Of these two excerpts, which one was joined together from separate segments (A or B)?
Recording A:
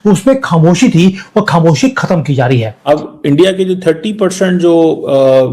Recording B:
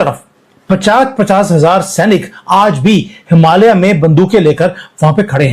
A